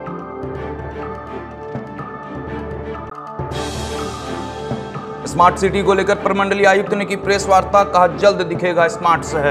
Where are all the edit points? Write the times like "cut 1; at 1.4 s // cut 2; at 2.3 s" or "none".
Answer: none